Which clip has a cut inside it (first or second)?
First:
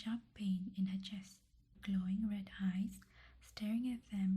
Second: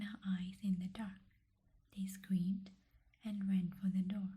first